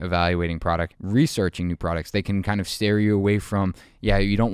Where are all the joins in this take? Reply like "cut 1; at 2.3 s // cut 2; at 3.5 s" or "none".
cut 1; at 0.9 s